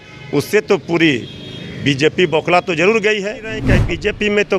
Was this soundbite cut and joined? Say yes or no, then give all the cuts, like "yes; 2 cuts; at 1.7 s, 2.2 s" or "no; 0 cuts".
yes; 1 cut; at 3.6 s